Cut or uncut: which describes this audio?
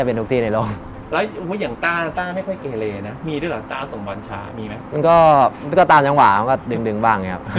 uncut